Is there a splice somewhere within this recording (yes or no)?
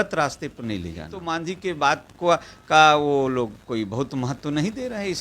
yes